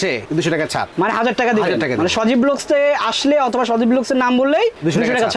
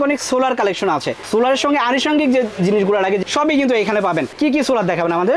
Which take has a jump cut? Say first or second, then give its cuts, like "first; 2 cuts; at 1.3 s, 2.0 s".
second; 2 cuts; at 3.2 s, 4.4 s